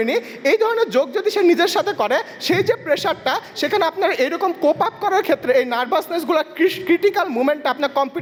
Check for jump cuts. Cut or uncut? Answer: uncut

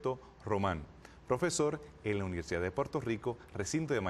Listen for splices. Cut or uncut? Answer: uncut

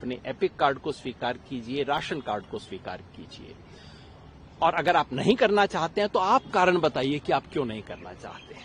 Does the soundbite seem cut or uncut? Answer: uncut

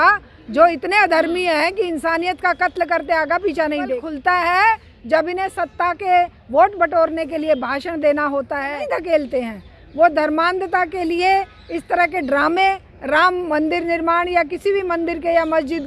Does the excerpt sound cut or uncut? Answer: cut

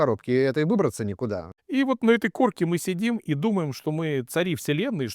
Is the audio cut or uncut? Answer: cut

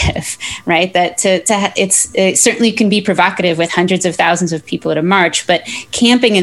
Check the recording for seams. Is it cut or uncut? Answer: uncut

